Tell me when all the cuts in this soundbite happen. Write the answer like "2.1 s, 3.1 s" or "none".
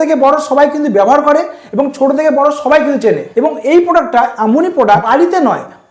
3.3 s, 5.1 s